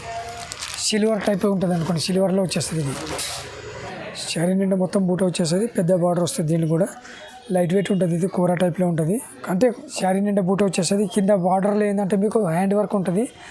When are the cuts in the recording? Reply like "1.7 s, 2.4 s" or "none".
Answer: 3.8 s, 9.9 s

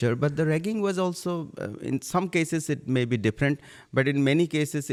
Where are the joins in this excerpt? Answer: none

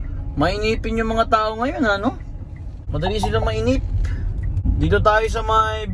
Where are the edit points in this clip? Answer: none

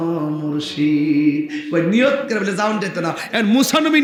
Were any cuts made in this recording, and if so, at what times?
none

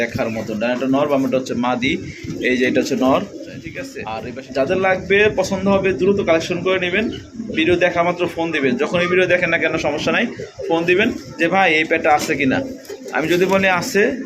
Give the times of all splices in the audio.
4.0 s

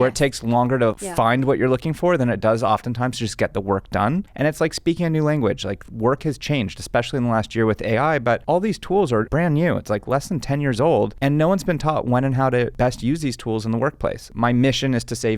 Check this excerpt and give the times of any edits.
1.0 s, 9.3 s, 12.7 s, 14.3 s

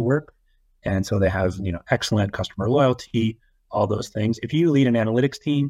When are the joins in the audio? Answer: none

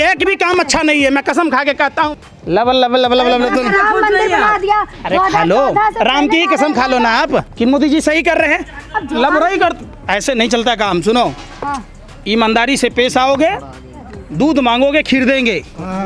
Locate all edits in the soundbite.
none

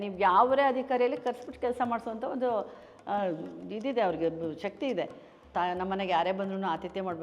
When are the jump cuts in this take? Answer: 5.5 s

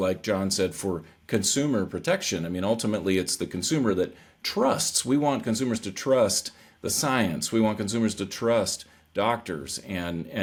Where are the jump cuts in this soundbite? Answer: none

